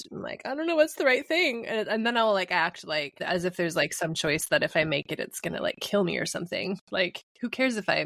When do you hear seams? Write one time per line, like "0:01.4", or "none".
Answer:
none

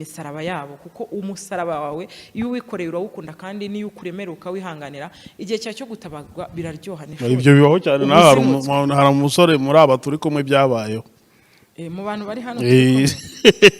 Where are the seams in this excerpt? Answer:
0:07.1

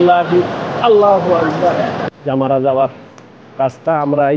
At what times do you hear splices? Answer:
0:02.1

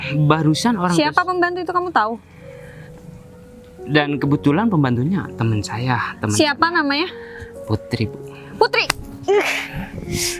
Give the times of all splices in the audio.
none

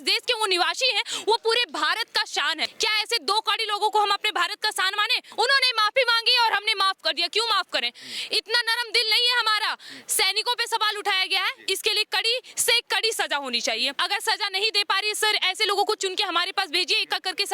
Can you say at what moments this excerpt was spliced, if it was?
0:02.7
0:05.2
0:13.9

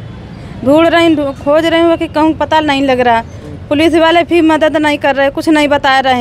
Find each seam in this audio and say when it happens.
none

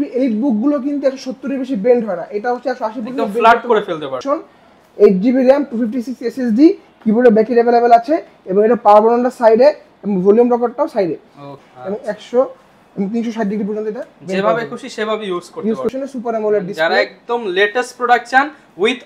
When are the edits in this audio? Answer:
0:04.1
0:11.5
0:15.9

